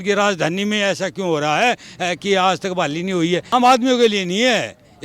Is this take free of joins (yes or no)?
no